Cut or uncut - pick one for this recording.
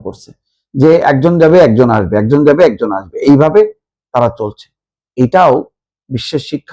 uncut